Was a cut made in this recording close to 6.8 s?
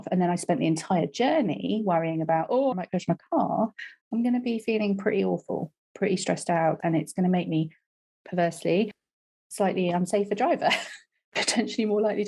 yes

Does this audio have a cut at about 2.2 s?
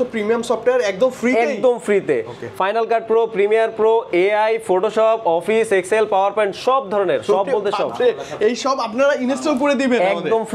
no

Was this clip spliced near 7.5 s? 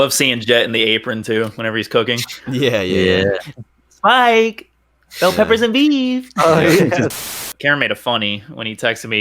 yes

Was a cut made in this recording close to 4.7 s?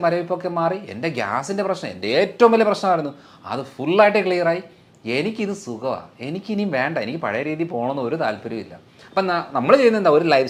no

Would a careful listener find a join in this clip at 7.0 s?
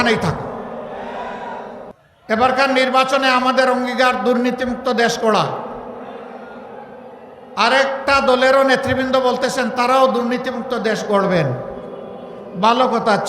no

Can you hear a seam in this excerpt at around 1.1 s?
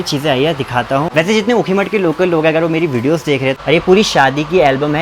yes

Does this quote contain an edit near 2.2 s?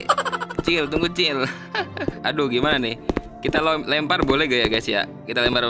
yes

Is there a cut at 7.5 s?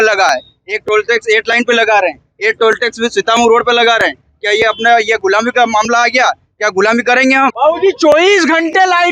yes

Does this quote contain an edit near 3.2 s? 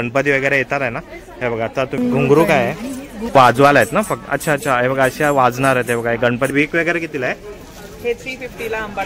yes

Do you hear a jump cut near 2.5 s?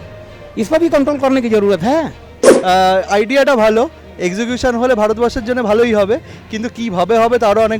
yes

